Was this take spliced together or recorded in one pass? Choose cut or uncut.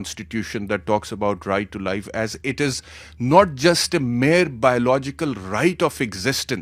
uncut